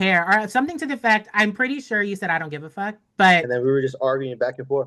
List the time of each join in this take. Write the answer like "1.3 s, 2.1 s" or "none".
3.5 s

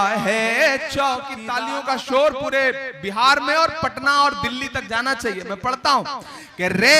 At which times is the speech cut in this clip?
1.4 s

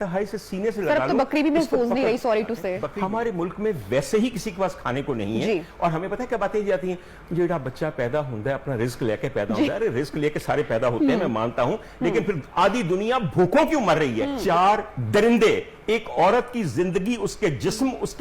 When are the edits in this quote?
2.9 s, 14.4 s

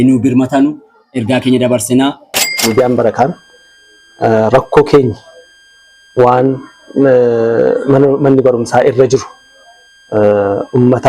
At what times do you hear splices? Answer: 2.5 s

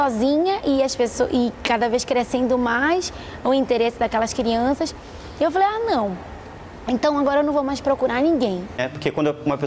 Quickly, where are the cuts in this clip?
8.7 s

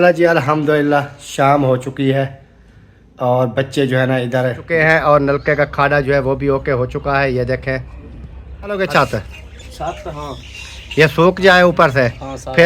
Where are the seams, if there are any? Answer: 4.8 s, 8.8 s

